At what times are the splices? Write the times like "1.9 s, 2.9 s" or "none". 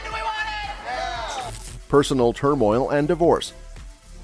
none

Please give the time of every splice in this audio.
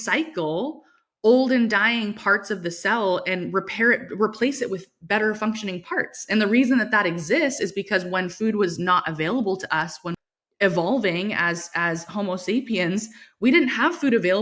10.1 s

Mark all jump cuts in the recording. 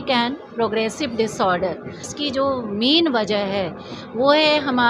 2.1 s

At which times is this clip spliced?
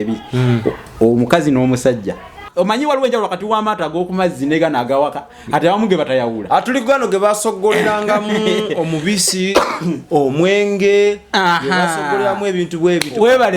2.4 s

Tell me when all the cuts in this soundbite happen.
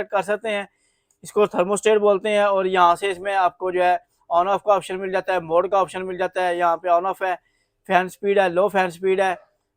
none

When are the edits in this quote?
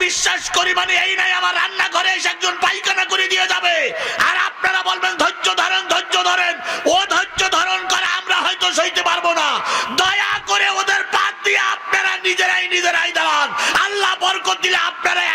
none

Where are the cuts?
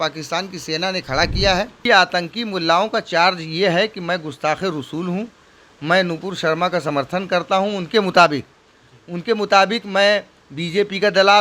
1.8 s

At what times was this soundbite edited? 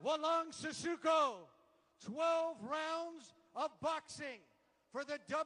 1.4 s

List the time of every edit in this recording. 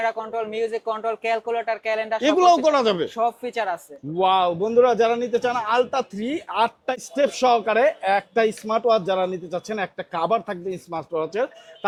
none

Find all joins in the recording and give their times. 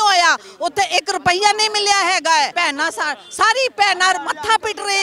2.5 s

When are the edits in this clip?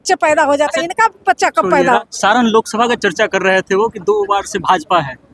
2.0 s

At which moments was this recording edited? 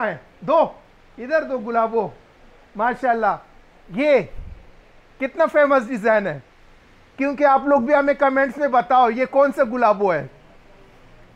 none

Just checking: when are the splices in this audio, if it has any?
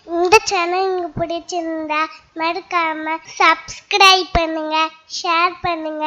3.3 s

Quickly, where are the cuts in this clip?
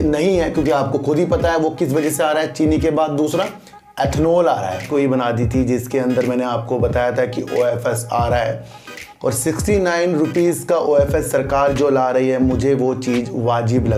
4.8 s

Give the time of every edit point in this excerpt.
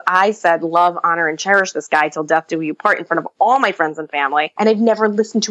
4.5 s

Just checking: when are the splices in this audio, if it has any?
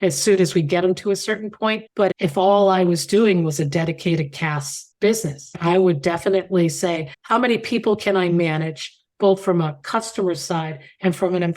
5.5 s, 7.1 s

